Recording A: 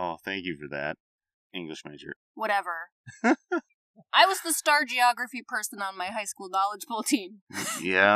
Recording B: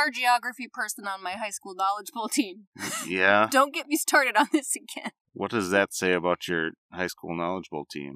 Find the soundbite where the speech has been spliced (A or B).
A